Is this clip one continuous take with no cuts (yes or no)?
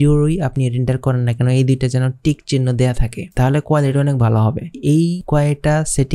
no